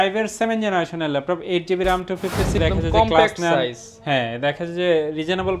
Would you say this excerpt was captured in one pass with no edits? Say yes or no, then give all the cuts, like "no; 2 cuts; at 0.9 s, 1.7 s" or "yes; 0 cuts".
no; 1 cut; at 2.6 s